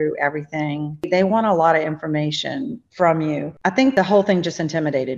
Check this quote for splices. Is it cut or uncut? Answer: cut